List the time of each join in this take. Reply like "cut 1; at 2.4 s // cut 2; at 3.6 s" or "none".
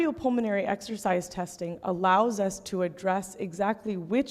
none